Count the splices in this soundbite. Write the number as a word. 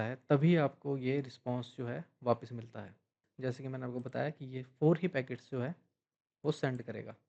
one